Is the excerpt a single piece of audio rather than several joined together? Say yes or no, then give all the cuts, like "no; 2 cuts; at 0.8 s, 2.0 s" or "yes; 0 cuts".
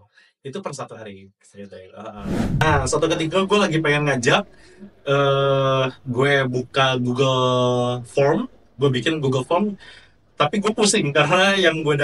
no; 1 cut; at 2.6 s